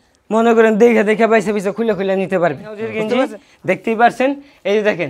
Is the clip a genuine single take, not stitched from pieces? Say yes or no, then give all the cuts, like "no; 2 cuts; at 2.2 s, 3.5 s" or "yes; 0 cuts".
no; 1 cut; at 3.0 s